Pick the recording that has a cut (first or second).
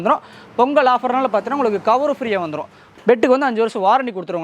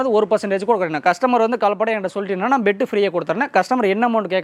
first